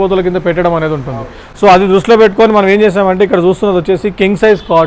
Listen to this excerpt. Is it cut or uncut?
uncut